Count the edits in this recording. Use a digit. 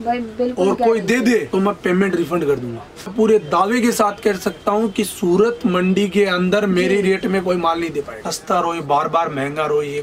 2